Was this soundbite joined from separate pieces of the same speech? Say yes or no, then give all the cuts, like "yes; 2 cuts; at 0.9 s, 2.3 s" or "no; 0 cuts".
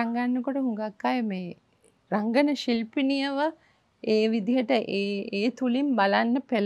no; 0 cuts